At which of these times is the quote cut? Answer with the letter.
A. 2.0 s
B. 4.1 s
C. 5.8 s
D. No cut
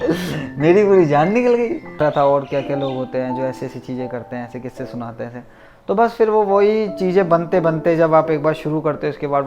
A